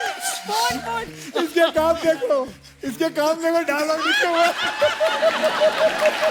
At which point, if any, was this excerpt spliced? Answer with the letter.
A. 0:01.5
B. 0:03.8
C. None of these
C